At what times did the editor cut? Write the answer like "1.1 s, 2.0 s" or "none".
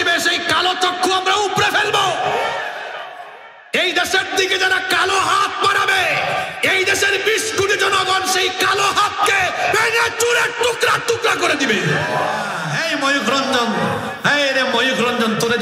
12.6 s